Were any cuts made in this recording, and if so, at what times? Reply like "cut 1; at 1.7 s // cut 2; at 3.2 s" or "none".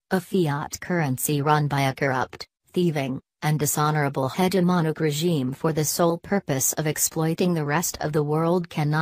cut 1; at 5.9 s

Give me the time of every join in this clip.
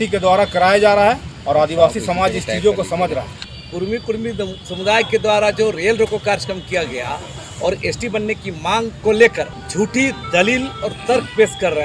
cut 1; at 3.4 s // cut 2; at 8.9 s // cut 3; at 9.6 s

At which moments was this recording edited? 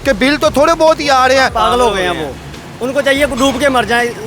cut 1; at 1.5 s

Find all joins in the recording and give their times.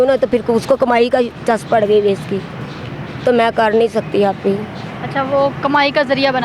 none

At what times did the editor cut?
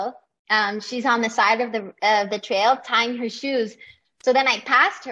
none

